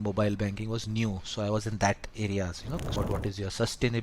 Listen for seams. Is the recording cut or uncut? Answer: cut